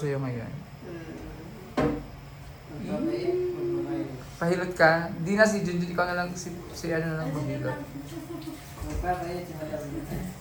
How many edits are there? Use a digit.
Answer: 0